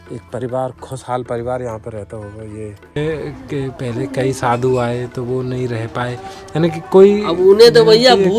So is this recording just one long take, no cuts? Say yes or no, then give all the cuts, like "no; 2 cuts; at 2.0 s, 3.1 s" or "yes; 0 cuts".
no; 1 cut; at 3.0 s